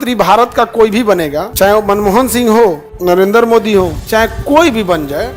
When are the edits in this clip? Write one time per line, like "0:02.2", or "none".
0:01.5
0:02.9
0:04.0